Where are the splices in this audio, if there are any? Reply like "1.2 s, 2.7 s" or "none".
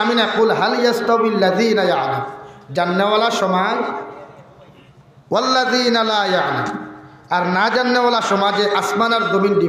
none